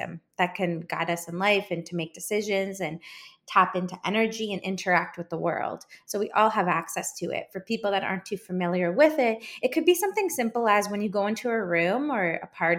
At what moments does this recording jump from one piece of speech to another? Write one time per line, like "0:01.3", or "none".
none